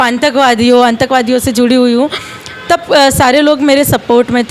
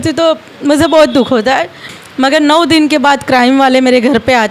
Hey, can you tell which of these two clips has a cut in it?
second; 1 cut; at 2.3 s

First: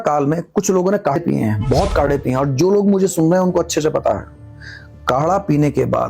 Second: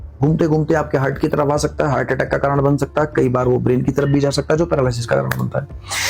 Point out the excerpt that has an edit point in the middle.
first; 1 cut; at 1.2 s

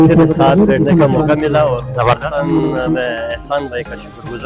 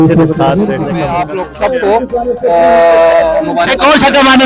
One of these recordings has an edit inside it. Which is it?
second; 1 cut; at 1.2 s

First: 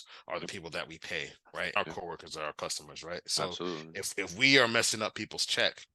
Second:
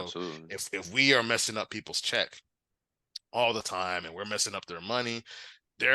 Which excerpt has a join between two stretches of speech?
first; 1 cut; at 1.8 s

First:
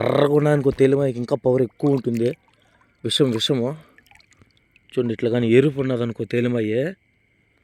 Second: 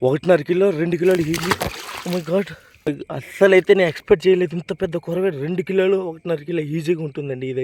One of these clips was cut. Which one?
second; 1 cut; at 2.9 s

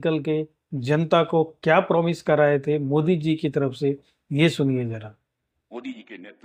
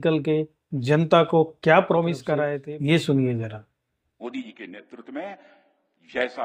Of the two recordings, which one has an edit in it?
second; 1 cut; at 2.5 s

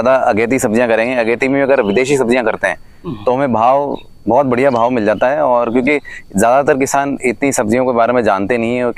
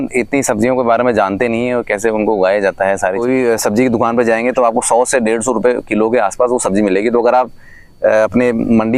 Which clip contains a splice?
second; 1 cut; at 3.1 s

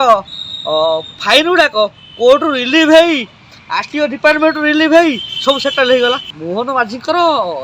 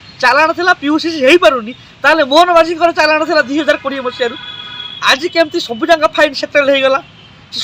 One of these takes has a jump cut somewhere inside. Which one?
first; 1 cut; at 6.3 s

